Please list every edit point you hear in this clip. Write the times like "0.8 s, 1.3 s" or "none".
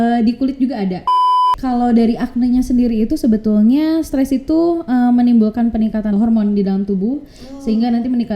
1.4 s, 6.1 s